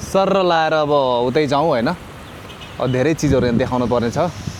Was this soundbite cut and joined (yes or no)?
no